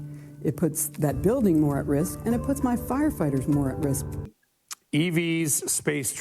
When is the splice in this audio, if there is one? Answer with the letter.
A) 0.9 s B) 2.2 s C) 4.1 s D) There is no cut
C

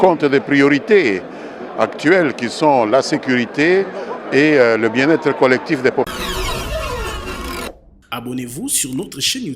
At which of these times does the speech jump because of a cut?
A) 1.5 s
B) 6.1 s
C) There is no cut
B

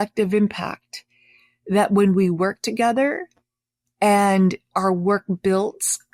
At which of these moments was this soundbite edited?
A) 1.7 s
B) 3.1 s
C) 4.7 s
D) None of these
C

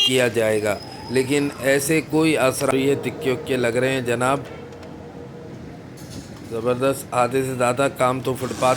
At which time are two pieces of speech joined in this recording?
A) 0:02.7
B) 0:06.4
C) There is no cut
A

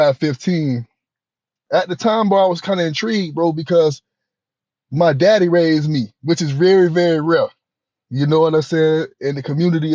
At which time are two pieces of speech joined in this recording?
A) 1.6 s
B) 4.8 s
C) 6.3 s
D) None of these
A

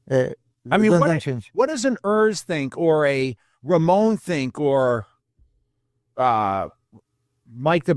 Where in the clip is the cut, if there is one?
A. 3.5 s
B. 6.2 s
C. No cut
C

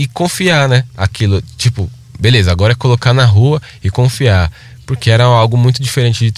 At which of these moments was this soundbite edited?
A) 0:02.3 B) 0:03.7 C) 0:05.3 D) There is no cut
D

